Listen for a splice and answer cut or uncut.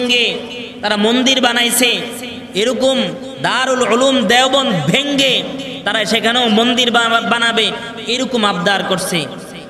uncut